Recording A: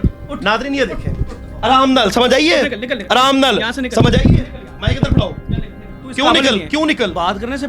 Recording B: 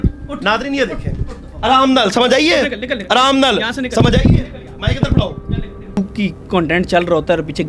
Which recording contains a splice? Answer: B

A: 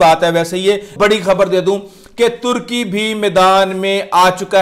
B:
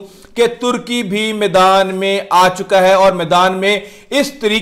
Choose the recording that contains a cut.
A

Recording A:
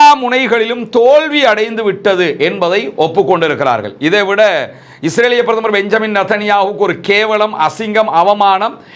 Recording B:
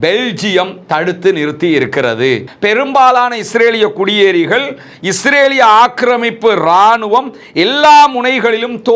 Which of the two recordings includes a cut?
B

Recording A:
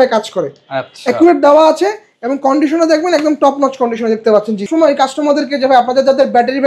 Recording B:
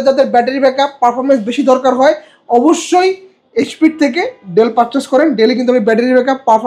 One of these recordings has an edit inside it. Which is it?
A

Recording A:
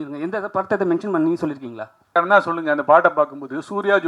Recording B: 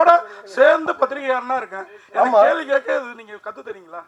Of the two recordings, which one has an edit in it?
A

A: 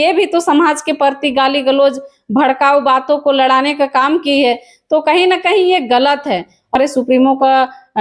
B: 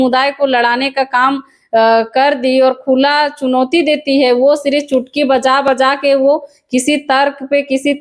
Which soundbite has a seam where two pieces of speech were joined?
A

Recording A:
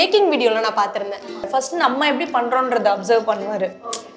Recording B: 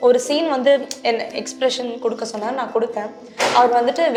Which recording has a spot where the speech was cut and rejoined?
A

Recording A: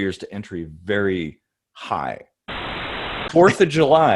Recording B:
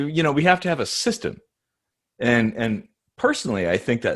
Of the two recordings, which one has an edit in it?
A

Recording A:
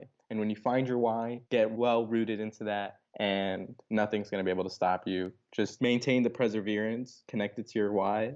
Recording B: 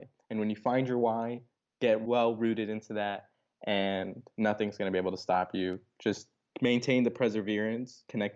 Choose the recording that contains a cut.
A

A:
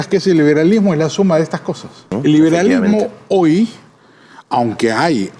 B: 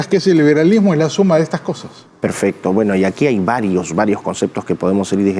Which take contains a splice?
A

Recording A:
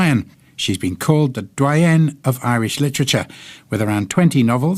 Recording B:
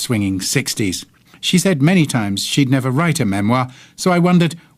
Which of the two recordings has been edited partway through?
B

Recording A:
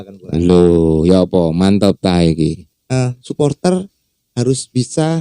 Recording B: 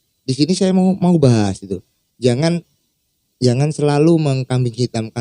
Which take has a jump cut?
A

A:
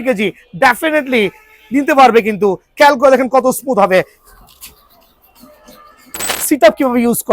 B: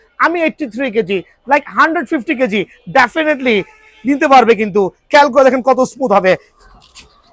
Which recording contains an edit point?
A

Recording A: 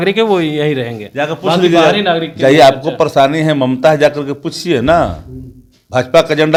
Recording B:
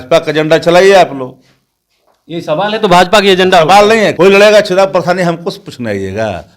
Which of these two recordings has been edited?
B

